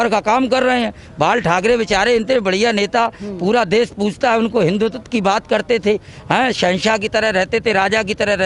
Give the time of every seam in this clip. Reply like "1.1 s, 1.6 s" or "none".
none